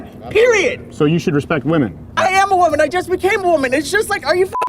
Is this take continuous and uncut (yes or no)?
no